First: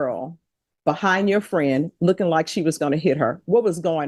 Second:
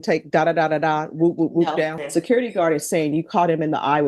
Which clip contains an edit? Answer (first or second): second